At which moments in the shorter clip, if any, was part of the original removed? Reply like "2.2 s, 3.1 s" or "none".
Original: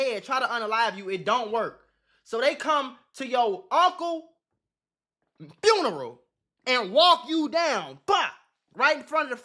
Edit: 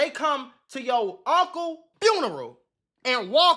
1.9 s